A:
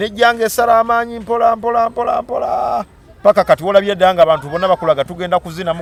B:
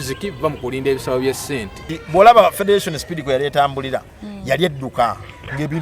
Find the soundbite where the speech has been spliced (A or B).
B